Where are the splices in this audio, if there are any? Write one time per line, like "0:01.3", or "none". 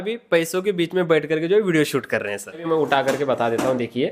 0:02.6